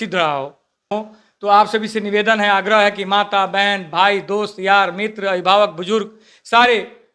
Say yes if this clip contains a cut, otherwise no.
yes